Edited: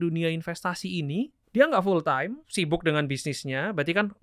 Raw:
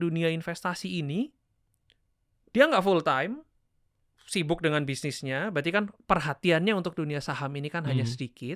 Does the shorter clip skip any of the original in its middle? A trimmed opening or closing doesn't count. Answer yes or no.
yes